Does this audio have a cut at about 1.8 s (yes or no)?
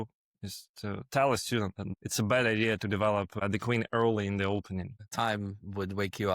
yes